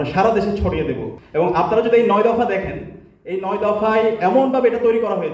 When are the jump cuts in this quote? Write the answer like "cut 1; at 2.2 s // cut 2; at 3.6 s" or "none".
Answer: cut 1; at 1.1 s